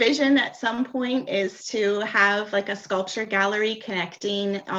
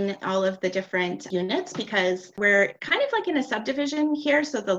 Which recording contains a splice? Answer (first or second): second